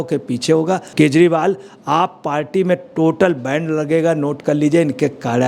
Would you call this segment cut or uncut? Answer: uncut